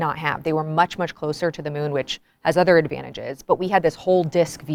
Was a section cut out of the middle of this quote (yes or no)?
no